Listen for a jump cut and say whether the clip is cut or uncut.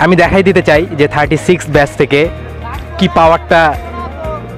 uncut